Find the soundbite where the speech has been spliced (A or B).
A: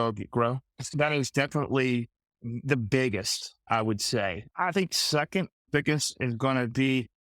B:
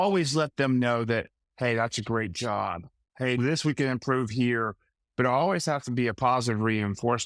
A